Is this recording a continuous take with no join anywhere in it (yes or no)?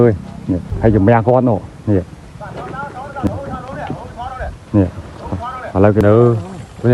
no